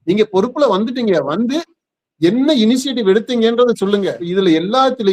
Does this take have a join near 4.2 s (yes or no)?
yes